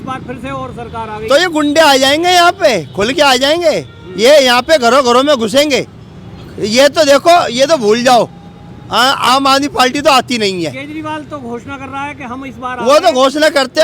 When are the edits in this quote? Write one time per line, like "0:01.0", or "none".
none